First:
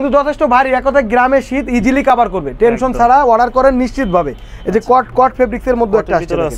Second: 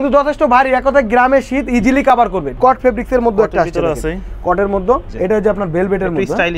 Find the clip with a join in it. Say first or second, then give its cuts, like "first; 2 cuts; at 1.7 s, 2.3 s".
second; 2 cuts; at 2.5 s, 5.1 s